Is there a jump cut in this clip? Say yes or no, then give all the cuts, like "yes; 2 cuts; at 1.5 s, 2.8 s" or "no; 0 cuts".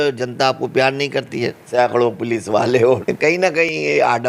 yes; 2 cuts; at 1.6 s, 3.4 s